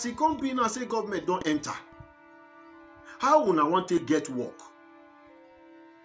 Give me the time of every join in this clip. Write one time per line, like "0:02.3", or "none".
0:01.8
0:03.2
0:05.2